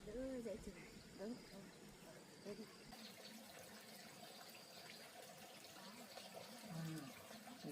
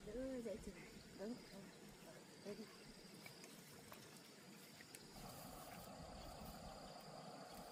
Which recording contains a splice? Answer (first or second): first